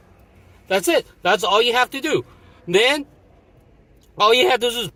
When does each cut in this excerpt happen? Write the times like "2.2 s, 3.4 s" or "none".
none